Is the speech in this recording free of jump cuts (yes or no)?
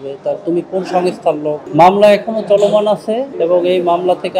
no